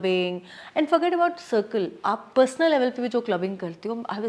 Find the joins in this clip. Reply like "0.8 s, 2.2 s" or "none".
none